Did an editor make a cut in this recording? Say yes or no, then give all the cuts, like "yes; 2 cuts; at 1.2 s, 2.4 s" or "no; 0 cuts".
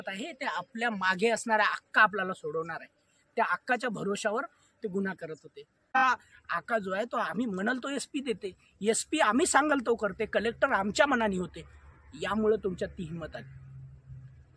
yes; 1 cut; at 5.9 s